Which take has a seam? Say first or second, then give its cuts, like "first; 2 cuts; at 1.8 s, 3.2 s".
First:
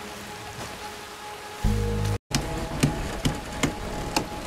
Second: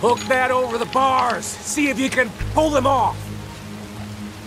first; 1 cut; at 2.2 s